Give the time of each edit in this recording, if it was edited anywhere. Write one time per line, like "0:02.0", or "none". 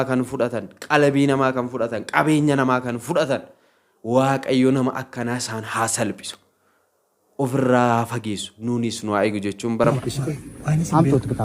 0:09.9

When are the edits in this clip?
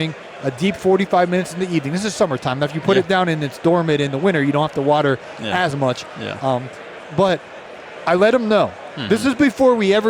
none

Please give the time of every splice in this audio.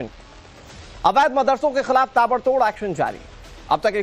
0:02.0

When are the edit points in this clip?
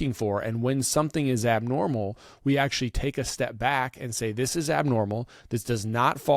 none

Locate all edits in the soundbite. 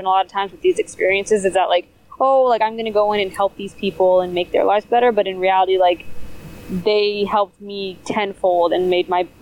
none

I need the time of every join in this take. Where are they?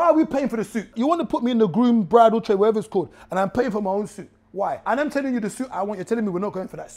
0:00.9
0:04.8

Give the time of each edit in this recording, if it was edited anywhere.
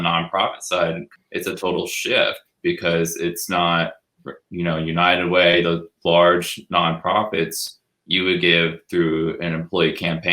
0:01.1

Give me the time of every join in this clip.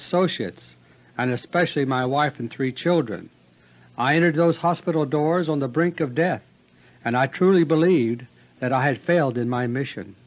0:02.9

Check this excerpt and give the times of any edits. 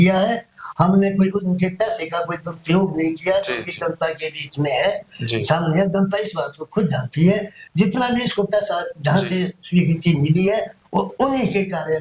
none

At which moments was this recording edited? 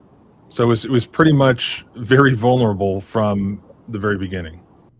none

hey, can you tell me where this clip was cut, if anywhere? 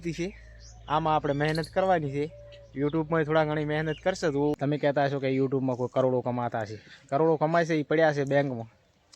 0:04.6

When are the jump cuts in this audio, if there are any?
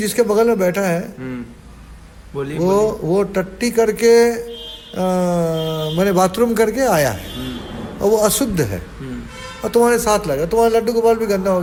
none

